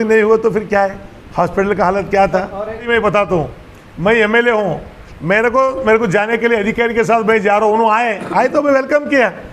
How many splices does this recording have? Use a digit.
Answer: 1